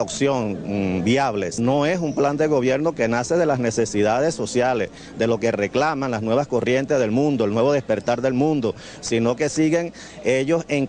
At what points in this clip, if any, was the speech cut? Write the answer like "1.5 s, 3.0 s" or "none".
4.4 s